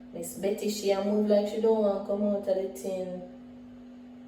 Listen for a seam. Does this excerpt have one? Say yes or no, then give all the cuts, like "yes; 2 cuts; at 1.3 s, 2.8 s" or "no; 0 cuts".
no; 0 cuts